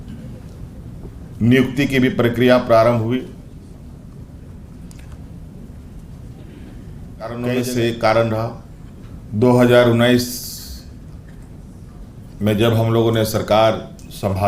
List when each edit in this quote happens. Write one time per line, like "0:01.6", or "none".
0:07.4